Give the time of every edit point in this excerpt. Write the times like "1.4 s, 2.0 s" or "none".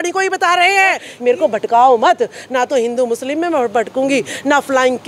1.1 s